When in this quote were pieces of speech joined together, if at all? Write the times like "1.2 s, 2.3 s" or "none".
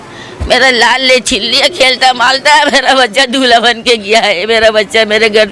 none